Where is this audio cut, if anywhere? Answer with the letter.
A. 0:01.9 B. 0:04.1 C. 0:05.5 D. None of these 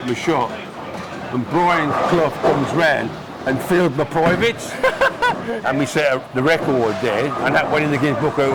C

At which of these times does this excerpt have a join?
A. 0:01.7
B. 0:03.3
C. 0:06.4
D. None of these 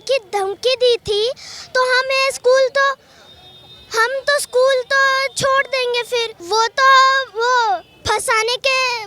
C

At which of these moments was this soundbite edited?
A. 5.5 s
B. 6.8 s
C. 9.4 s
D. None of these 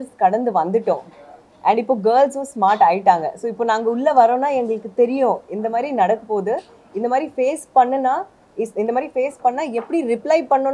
D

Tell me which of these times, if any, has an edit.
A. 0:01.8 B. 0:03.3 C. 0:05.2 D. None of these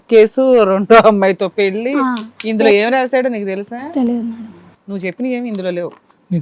D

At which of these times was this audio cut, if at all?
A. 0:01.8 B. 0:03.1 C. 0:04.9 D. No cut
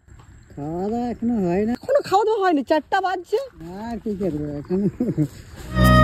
A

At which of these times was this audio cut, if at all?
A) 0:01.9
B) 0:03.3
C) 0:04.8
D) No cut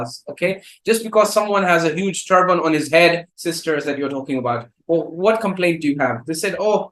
B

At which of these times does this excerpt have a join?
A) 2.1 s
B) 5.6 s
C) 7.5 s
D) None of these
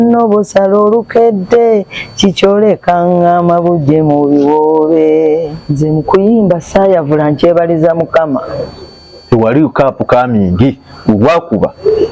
B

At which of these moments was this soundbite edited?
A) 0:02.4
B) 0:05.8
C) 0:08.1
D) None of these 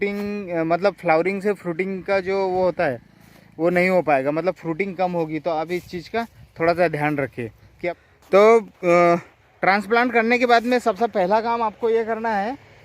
C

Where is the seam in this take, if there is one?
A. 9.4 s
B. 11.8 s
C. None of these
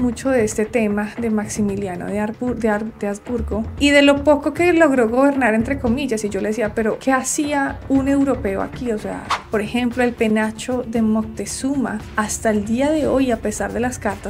A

